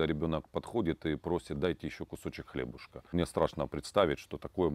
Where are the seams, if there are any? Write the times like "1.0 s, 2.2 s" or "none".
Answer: 3.1 s